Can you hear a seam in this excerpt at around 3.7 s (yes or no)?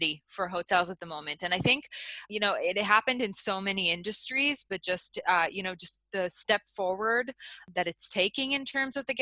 no